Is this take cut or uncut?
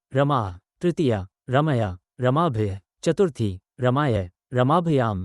cut